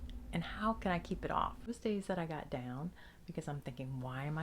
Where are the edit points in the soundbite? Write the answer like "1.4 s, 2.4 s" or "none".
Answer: 1.7 s